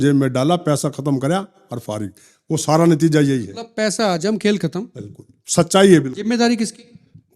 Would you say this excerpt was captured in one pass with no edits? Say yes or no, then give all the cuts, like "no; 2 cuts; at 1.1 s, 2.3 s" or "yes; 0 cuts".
yes; 0 cuts